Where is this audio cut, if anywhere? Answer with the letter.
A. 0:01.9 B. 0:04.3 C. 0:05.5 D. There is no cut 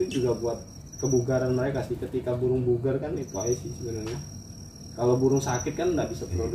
D